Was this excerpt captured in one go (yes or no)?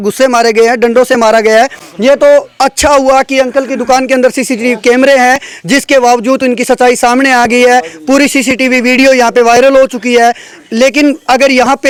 yes